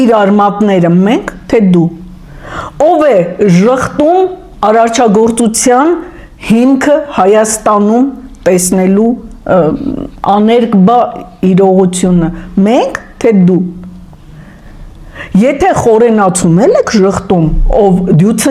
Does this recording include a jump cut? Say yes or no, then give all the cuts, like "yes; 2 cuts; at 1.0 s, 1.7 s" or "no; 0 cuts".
no; 0 cuts